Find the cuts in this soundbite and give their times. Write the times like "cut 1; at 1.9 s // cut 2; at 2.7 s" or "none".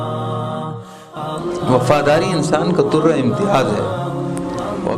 none